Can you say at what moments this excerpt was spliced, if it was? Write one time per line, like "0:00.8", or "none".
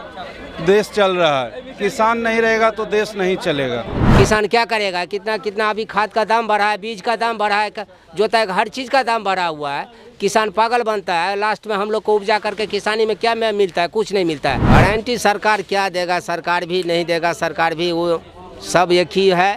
0:04.0
0:14.6